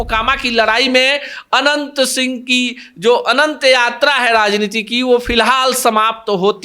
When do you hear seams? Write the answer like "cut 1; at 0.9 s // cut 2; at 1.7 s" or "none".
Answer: none